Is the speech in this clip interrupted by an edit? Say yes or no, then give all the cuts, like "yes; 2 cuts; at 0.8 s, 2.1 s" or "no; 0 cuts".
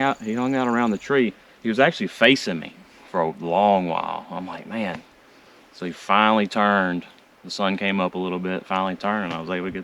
no; 0 cuts